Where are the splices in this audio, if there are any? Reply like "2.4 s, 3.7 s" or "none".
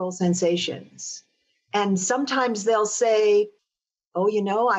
none